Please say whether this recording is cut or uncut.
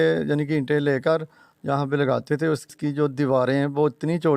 cut